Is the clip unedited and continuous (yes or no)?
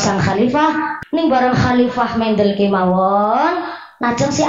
no